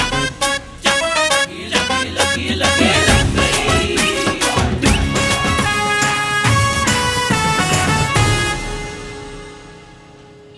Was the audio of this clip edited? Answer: yes; 1 cut; at 5.4 s

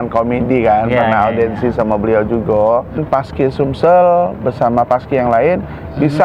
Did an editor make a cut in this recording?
yes; 1 cut; at 3.0 s

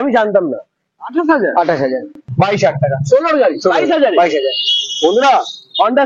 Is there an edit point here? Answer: yes; 1 cut; at 2.2 s

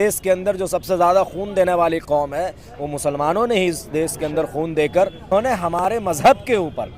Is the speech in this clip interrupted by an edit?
yes; 1 cut; at 5.3 s

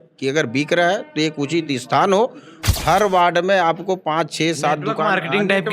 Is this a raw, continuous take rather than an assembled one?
no; 1 cut; at 2.7 s

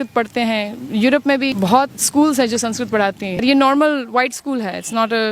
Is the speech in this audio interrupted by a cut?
yes; 2 cuts; at 1.5 s, 3.4 s

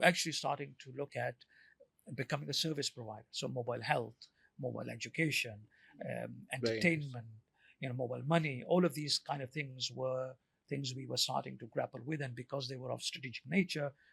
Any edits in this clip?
no; 0 cuts

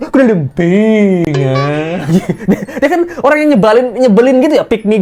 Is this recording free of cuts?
yes; 0 cuts

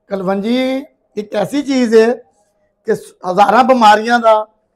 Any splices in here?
no; 0 cuts

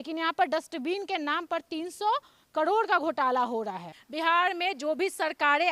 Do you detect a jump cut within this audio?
yes; 1 cut; at 4.0 s

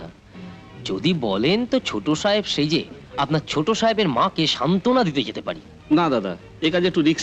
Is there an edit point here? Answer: no; 0 cuts

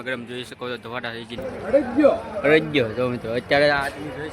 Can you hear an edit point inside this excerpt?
yes; 1 cut; at 1.4 s

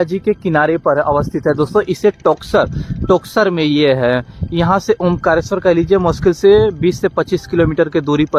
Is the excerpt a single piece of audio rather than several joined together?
yes; 0 cuts

